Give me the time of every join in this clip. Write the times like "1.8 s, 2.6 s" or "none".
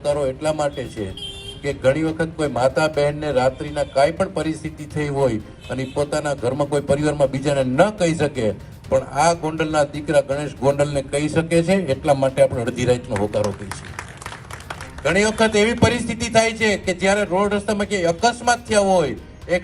none